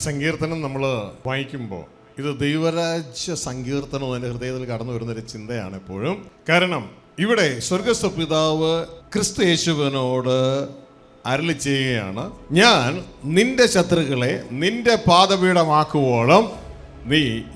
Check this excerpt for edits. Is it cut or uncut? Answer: cut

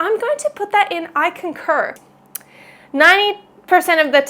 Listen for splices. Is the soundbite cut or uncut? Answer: cut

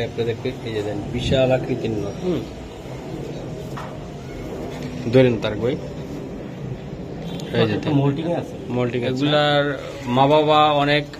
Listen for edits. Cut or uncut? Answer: cut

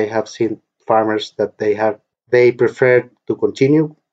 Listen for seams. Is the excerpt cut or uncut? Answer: uncut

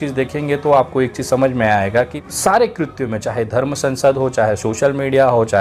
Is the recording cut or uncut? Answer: cut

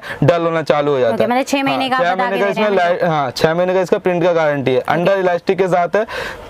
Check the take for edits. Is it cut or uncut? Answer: uncut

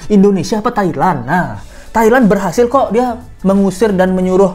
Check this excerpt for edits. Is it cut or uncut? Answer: uncut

